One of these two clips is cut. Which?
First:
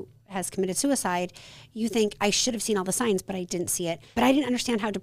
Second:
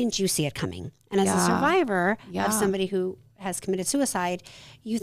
first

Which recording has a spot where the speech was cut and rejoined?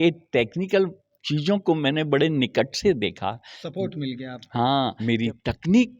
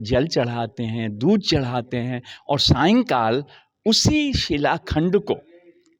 first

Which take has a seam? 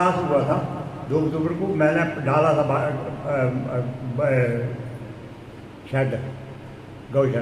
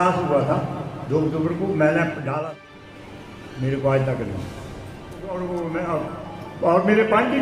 second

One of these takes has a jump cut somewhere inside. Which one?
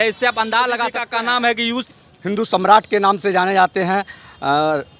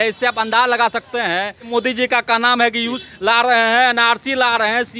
first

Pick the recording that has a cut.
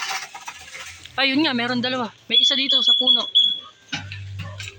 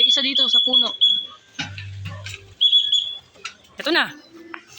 second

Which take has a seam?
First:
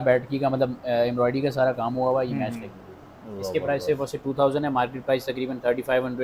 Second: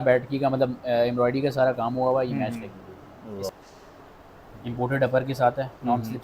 second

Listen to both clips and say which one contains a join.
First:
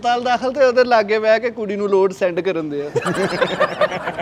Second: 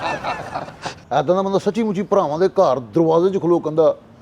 second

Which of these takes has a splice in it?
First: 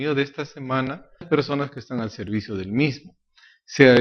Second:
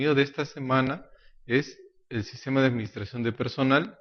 second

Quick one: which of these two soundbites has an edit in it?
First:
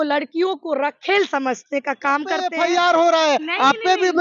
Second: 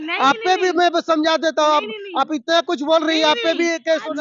first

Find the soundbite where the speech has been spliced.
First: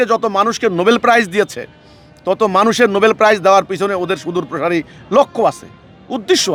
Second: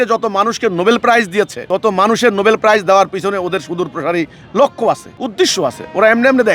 second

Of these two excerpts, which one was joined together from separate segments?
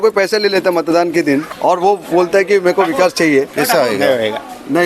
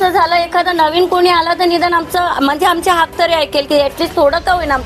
first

